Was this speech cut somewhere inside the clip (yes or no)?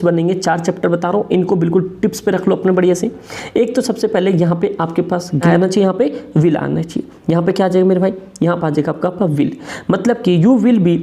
yes